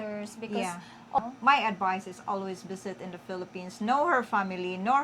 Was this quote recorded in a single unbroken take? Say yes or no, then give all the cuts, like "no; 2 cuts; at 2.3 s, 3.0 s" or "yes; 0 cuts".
no; 1 cut; at 1.2 s